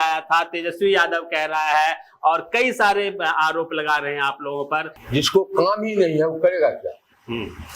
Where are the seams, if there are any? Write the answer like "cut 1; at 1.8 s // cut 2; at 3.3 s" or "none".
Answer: cut 1; at 5.0 s